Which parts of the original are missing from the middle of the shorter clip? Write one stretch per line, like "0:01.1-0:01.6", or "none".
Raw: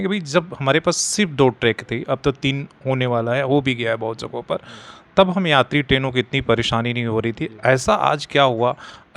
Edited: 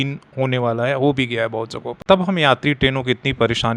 0:04.3-0:04.9